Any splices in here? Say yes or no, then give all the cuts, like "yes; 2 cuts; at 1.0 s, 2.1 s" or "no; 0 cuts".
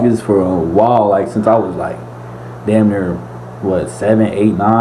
no; 0 cuts